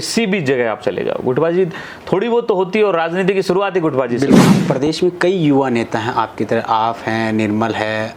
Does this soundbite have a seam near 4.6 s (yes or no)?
yes